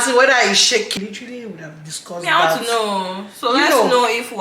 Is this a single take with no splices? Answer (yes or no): no